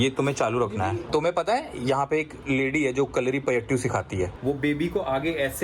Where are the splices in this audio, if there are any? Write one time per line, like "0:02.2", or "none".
0:01.0
0:04.4